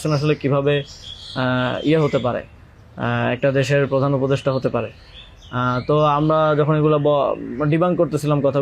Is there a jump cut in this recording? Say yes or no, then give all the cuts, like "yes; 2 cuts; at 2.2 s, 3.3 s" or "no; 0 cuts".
no; 0 cuts